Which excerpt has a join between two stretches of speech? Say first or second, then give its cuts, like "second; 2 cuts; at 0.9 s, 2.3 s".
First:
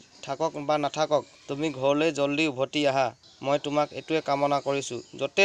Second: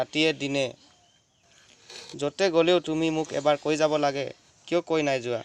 first; 2 cuts; at 1.4 s, 3.3 s